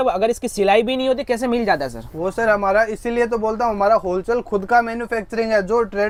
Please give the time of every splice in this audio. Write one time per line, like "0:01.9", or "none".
none